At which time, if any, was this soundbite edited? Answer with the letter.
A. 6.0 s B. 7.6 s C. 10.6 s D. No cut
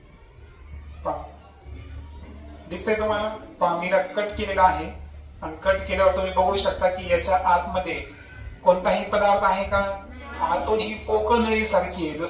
D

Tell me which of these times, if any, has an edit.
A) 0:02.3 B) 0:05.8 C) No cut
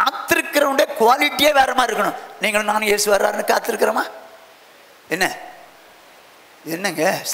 C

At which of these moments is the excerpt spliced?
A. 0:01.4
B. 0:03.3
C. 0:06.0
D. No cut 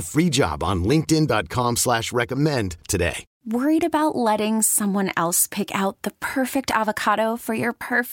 B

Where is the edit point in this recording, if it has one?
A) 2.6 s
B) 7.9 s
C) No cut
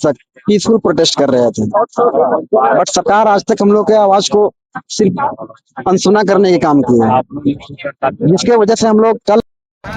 C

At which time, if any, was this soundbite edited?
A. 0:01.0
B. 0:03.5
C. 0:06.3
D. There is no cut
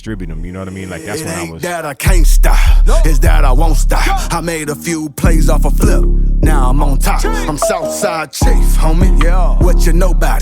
A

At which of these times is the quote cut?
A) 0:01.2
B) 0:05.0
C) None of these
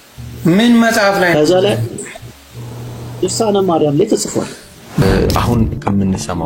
B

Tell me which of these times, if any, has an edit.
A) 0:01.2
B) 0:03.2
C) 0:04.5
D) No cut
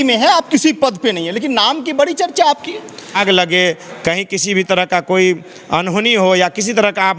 B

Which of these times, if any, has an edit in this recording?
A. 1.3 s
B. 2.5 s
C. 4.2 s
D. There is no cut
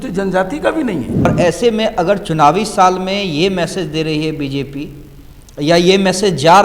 A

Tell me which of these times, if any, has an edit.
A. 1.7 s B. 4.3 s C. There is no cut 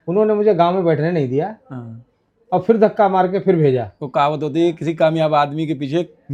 C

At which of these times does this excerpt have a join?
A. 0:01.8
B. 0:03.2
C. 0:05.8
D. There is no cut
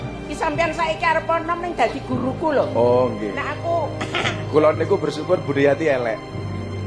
D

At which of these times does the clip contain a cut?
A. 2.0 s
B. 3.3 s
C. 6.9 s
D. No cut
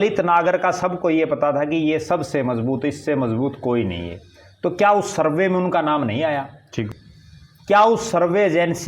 C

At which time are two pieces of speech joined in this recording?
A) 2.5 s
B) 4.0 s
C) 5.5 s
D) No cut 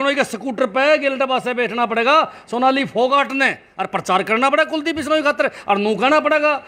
D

